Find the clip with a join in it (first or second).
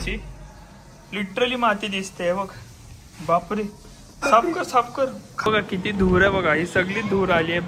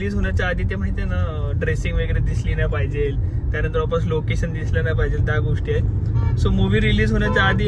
first